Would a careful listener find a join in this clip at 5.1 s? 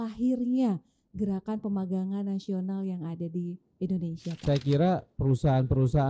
yes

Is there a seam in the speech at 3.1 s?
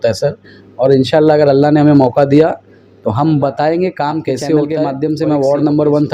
no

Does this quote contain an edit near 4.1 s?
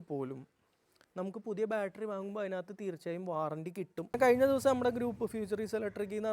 yes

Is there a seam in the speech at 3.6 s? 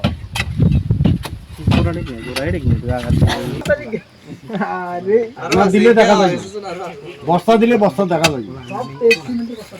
yes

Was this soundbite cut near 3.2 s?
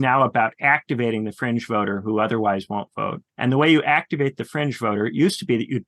yes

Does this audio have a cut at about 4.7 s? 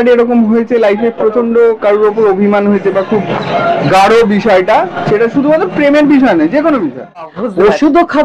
no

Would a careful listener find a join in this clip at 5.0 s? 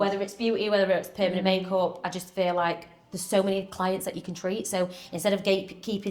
no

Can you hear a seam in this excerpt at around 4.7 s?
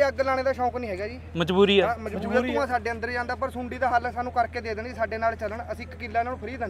no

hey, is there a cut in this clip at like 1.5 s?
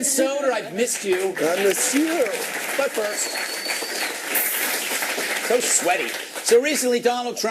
no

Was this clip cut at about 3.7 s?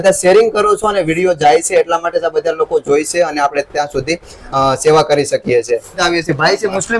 no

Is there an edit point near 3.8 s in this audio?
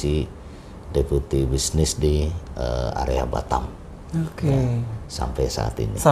no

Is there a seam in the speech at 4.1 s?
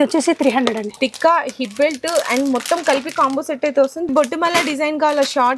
yes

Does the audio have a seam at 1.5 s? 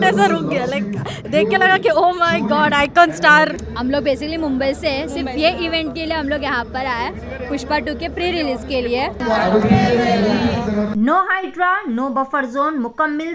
no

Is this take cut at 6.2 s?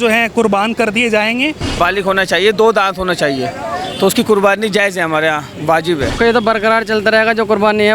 yes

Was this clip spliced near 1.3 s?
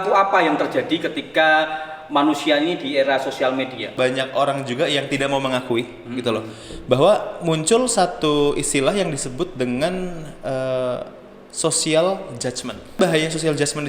no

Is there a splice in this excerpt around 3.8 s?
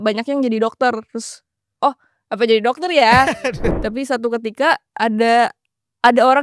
yes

